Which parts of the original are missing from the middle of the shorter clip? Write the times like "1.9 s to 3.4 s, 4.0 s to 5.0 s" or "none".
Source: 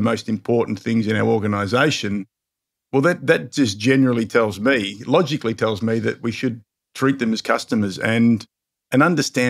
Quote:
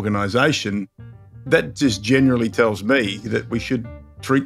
2.8 s to 3.2 s, 5.0 s to 6.0 s